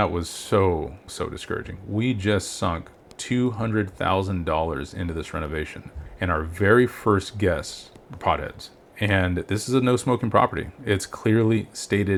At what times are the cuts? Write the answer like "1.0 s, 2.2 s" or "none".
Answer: none